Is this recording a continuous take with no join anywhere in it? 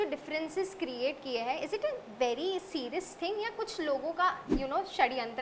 no; 1 cut; at 4.5 s

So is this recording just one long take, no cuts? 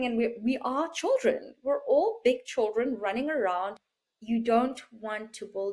no; 1 cut; at 3.8 s

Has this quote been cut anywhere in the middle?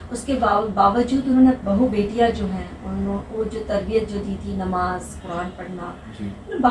yes; 1 cut; at 1.6 s

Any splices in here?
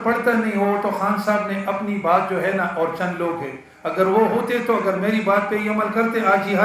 no; 0 cuts

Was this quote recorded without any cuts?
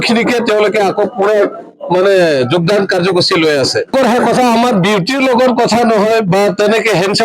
no; 1 cut; at 3.9 s

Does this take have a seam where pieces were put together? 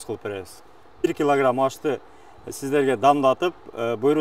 yes; 1 cut; at 1.0 s

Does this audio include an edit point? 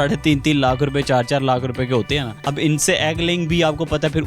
yes; 1 cut; at 2.4 s

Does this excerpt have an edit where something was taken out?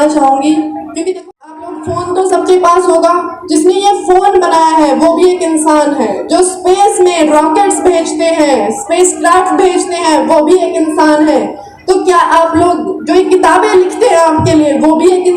yes; 1 cut; at 1.2 s

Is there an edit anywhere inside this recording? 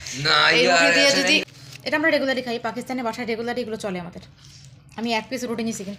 yes; 1 cut; at 1.4 s

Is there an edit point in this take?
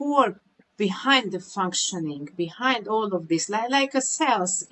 no; 0 cuts

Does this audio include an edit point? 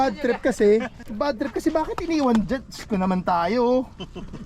yes; 1 cut; at 0.9 s

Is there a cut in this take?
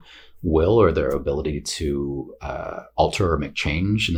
no; 0 cuts

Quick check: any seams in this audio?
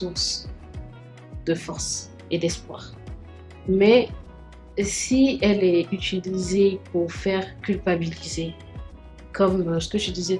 no; 0 cuts

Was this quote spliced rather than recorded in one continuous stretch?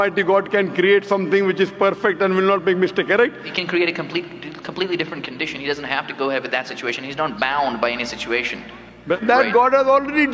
yes; 2 cuts; at 3.5 s, 9.2 s

